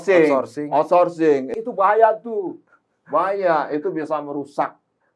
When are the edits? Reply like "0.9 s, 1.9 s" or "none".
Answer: 1.5 s